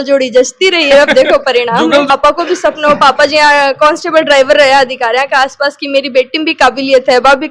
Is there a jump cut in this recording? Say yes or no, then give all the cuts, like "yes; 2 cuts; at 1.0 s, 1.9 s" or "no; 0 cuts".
yes; 1 cut; at 2.1 s